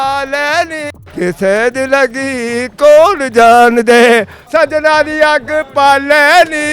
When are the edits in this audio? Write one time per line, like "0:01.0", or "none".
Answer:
0:04.4